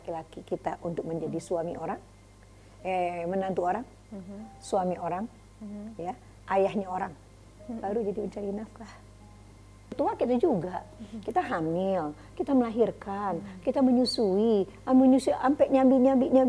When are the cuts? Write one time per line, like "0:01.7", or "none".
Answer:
0:09.9